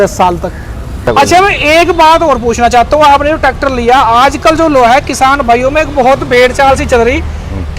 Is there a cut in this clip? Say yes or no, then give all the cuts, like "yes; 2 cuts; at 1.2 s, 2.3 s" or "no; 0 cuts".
yes; 1 cut; at 1.1 s